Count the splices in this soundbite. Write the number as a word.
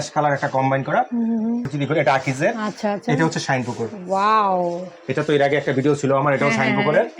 one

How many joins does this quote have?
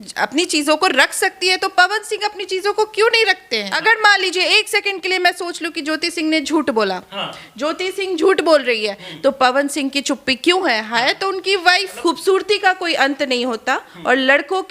two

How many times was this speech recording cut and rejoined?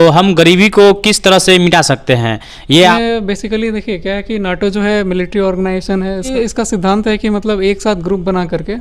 two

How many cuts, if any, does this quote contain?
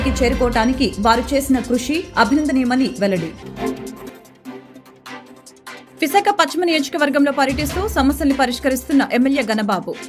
two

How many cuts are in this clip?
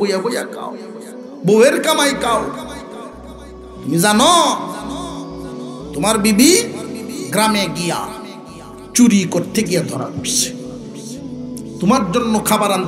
zero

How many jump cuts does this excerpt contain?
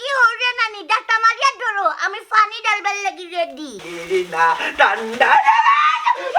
one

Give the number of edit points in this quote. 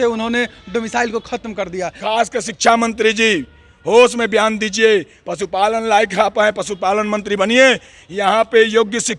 one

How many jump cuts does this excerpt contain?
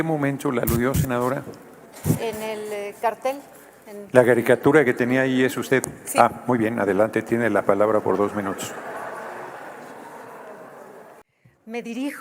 one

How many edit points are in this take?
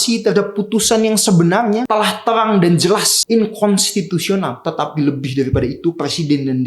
three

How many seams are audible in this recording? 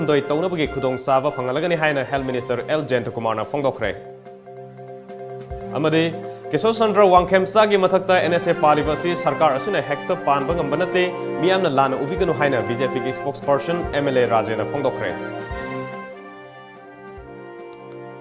one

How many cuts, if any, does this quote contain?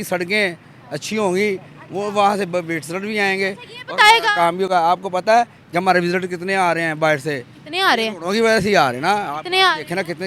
zero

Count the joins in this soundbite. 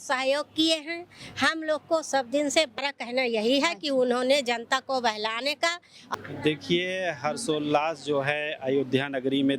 two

